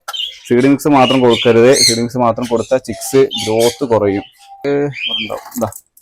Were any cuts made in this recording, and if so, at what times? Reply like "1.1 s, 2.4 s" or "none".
4.6 s